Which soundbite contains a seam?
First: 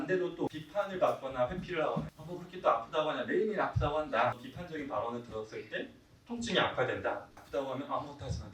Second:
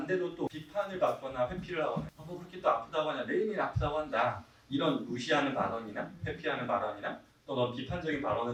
first; 2 cuts; at 4.5 s, 7.3 s

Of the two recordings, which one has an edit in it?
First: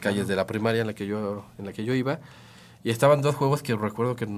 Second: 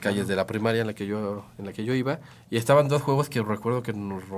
second; 1 cut; at 2.3 s

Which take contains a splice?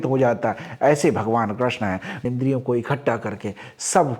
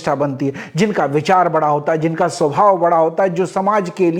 first; 1 cut; at 2.2 s

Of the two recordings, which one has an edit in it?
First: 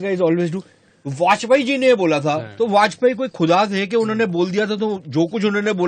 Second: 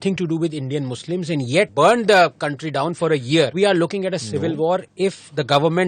second; 3 cuts; at 1.7 s, 3.5 s, 4.9 s

